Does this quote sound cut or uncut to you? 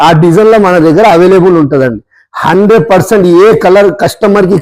uncut